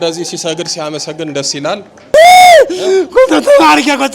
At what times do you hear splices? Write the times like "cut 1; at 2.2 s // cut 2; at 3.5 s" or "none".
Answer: cut 1; at 2.1 s